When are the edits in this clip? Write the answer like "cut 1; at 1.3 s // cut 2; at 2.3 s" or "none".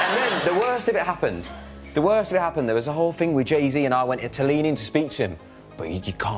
none